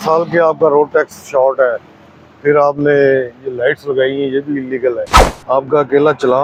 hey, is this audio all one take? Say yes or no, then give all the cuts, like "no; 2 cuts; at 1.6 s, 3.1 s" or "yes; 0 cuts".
yes; 0 cuts